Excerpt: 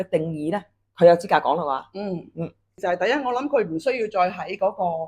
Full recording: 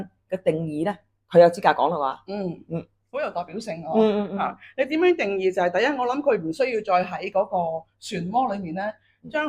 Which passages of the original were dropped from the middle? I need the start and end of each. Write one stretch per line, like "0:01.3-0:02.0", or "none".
0:03.1-0:05.5